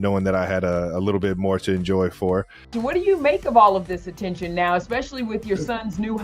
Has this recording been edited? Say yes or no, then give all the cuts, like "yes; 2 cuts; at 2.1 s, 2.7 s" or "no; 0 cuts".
yes; 1 cut; at 2.6 s